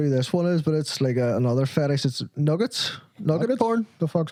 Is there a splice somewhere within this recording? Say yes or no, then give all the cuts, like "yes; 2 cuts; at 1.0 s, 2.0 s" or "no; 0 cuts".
no; 0 cuts